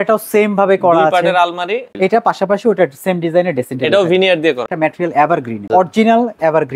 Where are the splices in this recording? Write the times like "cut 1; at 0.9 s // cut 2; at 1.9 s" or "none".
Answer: cut 1; at 1.9 s // cut 2; at 4.6 s // cut 3; at 5.7 s